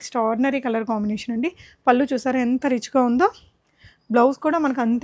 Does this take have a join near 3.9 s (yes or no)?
no